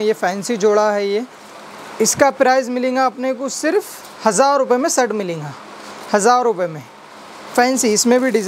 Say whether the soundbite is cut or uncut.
uncut